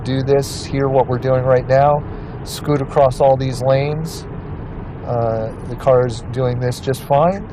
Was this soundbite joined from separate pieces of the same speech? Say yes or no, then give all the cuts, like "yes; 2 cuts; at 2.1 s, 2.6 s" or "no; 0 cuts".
no; 0 cuts